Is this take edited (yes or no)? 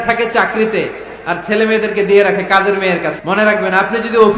yes